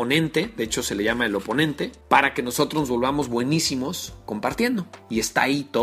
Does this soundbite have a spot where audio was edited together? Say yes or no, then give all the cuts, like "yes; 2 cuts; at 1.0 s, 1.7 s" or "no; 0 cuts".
yes; 2 cuts; at 2.0 s, 5.0 s